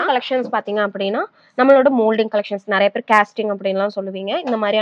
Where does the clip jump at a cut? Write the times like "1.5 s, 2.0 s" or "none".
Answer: none